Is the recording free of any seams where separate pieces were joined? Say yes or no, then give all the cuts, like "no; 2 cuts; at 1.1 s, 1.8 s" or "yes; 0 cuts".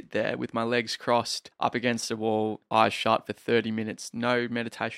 no; 1 cut; at 1.4 s